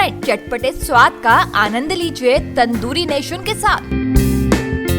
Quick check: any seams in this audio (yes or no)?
no